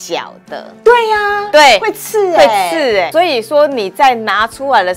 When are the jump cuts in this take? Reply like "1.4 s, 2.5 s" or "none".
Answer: 3.1 s